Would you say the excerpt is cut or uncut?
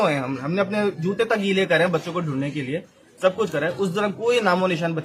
uncut